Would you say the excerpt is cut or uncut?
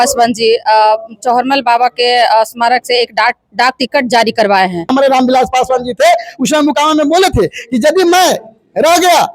cut